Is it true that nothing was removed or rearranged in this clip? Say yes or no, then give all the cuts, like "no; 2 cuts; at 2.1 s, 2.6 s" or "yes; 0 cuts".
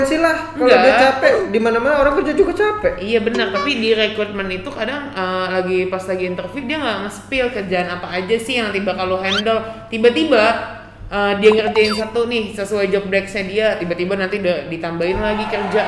yes; 0 cuts